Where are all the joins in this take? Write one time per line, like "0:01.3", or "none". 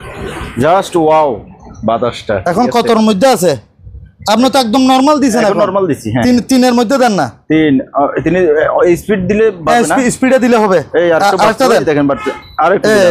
none